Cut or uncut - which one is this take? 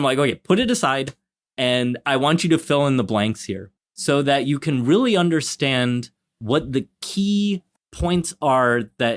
uncut